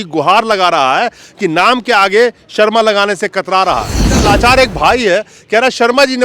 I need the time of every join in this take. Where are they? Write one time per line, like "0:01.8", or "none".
0:04.2